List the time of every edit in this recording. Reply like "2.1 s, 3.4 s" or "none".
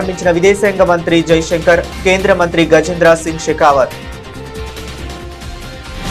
none